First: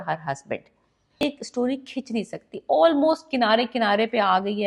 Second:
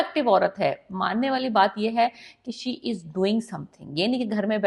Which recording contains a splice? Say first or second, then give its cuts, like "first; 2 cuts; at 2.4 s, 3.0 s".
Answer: first; 1 cut; at 1.2 s